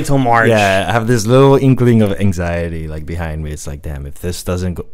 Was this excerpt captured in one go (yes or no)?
yes